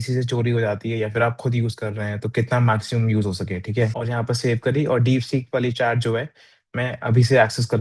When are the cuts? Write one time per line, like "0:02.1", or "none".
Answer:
0:04.0